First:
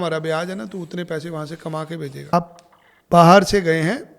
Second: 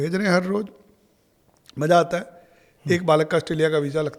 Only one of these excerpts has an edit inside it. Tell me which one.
first; 1 cut; at 2.3 s

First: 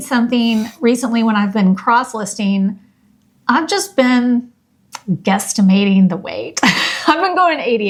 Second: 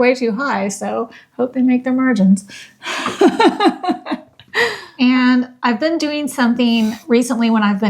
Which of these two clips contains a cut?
second; 1 cut; at 4.8 s

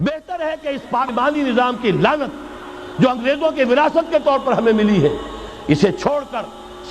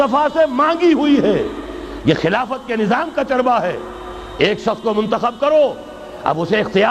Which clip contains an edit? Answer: first; 1 cut; at 1.1 s

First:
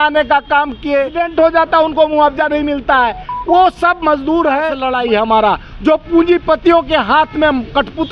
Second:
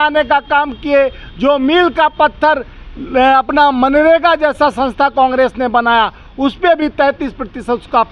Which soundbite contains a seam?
first; 2 cuts; at 1.2 s, 4.8 s

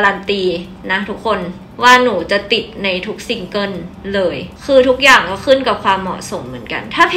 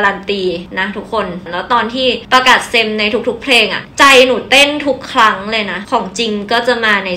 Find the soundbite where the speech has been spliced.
second; 2 cuts; at 1.0 s, 5.8 s

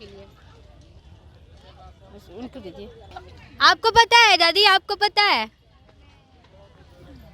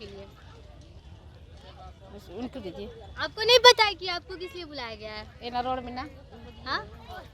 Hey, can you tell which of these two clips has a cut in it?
first; 1 cut; at 3.1 s

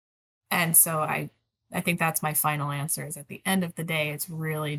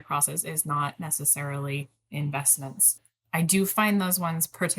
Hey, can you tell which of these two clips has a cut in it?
second; 1 cut; at 2.9 s

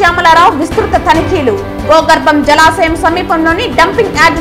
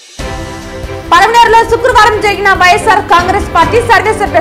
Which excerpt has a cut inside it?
second; 1 cut; at 1.0 s

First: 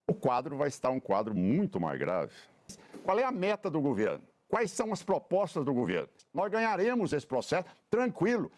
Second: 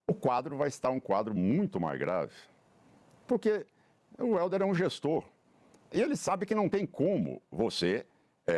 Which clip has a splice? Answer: first; 2 cuts; at 2.9 s, 6.2 s

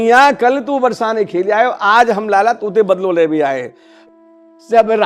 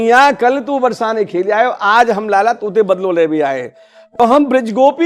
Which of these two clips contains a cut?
first; 1 cut; at 4.0 s

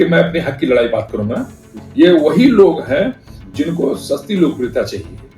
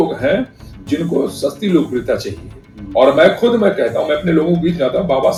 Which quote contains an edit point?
first; 1 cut; at 1.8 s

